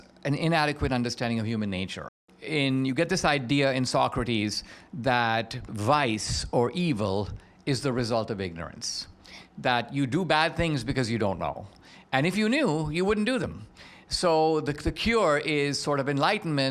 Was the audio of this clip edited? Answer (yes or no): yes